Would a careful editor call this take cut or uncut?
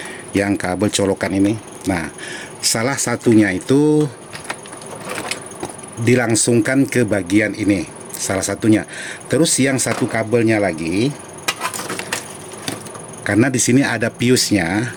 uncut